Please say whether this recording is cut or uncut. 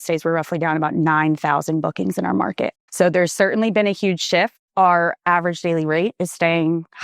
cut